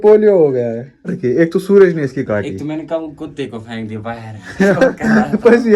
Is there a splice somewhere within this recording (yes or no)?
yes